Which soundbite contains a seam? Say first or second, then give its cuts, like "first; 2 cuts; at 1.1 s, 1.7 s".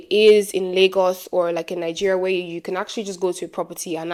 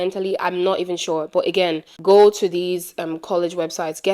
second; 1 cut; at 1.9 s